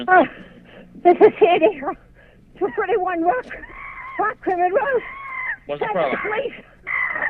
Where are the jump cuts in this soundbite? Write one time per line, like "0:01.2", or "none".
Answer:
none

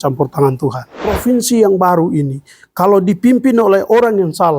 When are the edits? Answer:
0:01.1

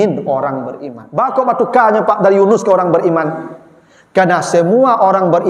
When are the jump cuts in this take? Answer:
0:01.3

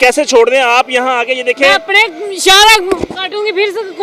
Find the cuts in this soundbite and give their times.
none

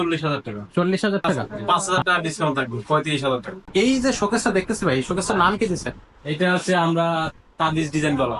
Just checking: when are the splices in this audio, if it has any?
0:01.5
0:03.5

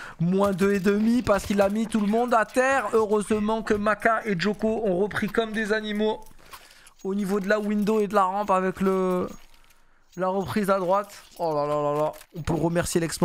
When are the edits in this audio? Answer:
none

